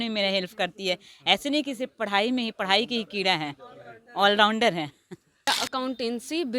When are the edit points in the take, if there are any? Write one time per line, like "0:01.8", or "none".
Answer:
0:05.4